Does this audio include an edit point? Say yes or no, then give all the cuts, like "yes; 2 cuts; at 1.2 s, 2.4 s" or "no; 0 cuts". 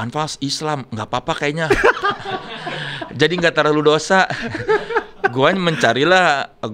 no; 0 cuts